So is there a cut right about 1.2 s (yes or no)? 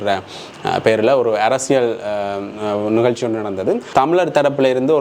no